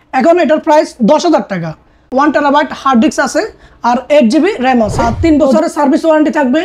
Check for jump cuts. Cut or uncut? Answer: cut